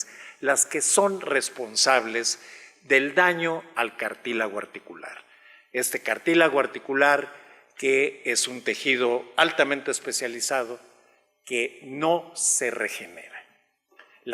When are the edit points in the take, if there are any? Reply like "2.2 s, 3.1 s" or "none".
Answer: 1.2 s